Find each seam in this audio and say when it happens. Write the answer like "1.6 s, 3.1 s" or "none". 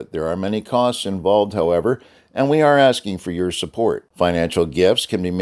none